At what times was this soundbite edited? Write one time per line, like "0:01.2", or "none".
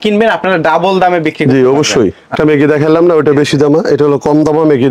0:02.3